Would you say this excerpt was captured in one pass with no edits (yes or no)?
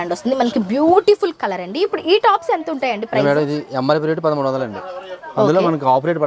yes